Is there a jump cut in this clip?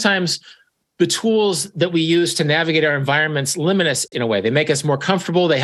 yes; 1 cut; at 4.1 s

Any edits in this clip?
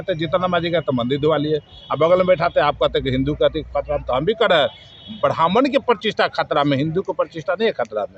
no; 0 cuts

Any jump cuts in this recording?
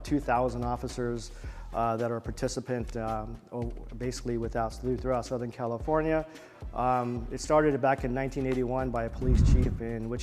no; 0 cuts

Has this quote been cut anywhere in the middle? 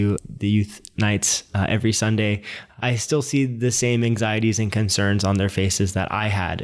no; 0 cuts

